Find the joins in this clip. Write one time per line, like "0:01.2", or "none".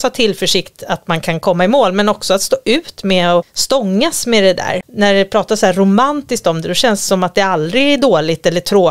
0:03.5
0:04.8